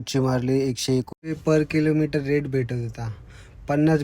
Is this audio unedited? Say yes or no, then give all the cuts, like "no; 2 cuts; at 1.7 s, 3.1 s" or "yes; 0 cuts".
no; 1 cut; at 1.2 s